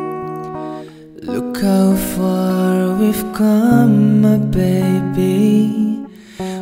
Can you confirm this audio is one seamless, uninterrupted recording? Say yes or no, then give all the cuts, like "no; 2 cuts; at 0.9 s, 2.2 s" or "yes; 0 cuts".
yes; 0 cuts